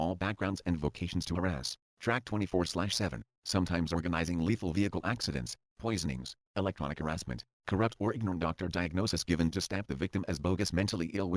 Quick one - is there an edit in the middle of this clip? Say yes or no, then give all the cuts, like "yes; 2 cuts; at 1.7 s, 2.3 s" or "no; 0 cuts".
yes; 2 cuts; at 2.4 s, 7.5 s